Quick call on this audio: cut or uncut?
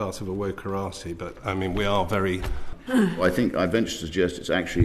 cut